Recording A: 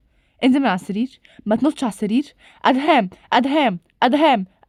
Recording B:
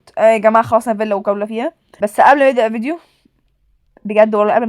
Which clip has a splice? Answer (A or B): B